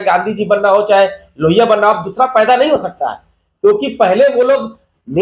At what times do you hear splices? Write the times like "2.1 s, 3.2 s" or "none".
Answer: none